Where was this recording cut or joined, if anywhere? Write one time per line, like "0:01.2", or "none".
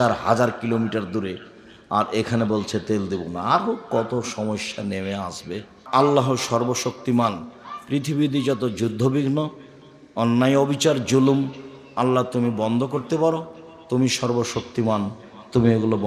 0:05.8